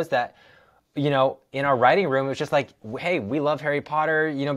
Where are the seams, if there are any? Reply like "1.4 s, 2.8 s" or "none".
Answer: none